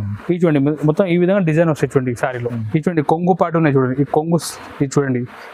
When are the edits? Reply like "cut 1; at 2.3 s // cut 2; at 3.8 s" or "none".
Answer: cut 1; at 2.6 s